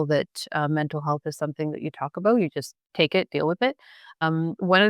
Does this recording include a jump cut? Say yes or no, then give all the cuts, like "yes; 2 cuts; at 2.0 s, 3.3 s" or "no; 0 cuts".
yes; 2 cuts; at 2.8 s, 4.2 s